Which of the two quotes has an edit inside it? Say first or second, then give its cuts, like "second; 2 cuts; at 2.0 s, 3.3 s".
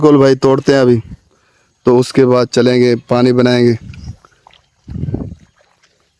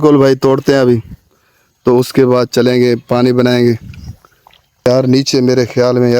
second; 1 cut; at 4.9 s